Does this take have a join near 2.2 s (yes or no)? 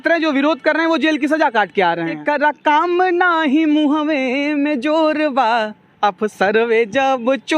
yes